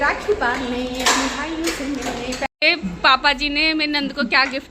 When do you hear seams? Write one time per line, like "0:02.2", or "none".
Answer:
0:02.5